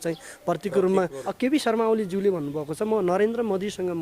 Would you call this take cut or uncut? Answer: cut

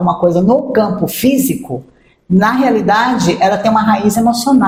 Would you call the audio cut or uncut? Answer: uncut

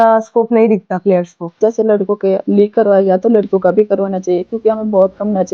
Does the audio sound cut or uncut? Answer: cut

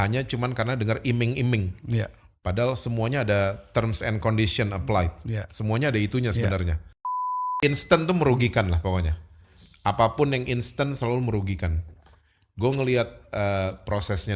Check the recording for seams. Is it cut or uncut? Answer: cut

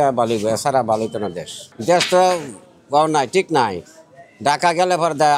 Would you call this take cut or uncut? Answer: uncut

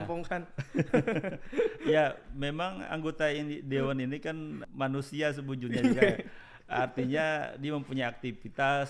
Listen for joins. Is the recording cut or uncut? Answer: cut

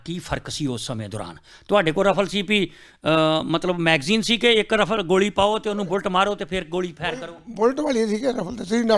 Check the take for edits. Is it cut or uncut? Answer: uncut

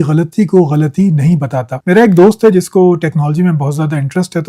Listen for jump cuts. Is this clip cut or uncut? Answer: uncut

